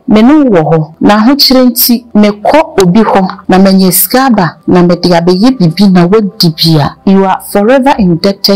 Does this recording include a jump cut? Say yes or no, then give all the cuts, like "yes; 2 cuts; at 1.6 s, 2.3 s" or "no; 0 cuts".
yes; 5 cuts; at 0.9 s, 2.1 s, 3.4 s, 4.6 s, 6.9 s